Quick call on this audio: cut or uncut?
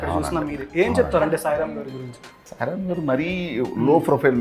cut